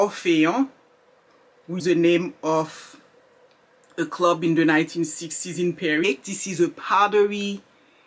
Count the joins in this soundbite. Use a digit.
2